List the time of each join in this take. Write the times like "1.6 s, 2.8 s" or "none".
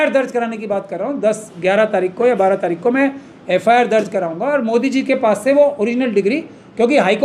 none